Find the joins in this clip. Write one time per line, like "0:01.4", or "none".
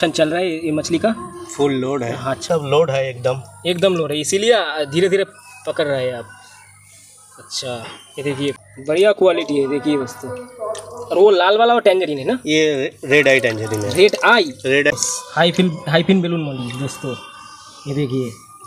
0:02.4
0:08.6
0:14.9